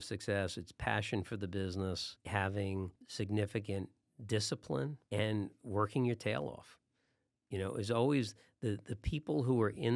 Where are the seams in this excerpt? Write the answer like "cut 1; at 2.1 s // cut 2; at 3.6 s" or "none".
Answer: cut 1; at 2.1 s // cut 2; at 3.0 s // cut 3; at 5.0 s